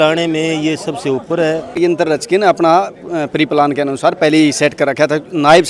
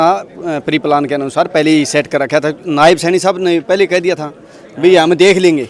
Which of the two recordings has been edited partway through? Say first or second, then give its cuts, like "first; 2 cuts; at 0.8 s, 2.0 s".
first; 1 cut; at 1.7 s